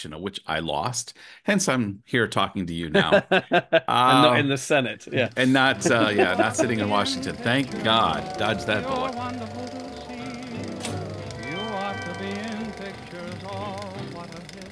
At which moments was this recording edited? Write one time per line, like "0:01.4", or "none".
0:08.8